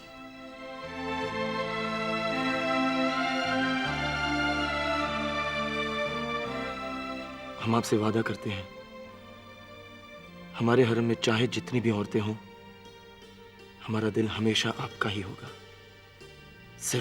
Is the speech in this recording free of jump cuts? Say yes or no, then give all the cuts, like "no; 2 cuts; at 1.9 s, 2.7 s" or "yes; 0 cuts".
yes; 0 cuts